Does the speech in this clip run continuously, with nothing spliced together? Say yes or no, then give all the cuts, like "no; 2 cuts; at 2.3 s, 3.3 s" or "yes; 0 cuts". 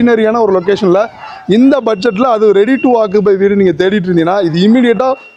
yes; 0 cuts